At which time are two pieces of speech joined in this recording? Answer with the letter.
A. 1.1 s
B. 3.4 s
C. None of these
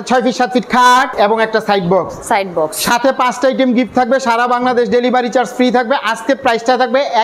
A